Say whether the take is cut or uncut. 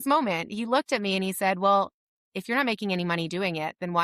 uncut